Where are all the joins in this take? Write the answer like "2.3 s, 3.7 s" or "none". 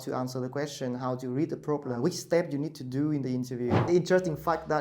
2.0 s, 3.9 s